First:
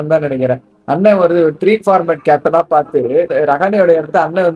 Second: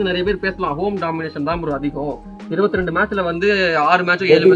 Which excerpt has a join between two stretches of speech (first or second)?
first